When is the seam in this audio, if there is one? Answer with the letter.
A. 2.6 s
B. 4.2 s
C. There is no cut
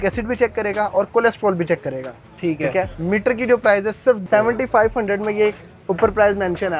B